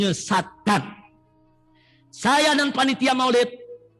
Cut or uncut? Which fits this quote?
uncut